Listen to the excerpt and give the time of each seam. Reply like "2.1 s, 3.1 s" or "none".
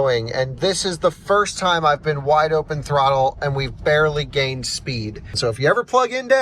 5.3 s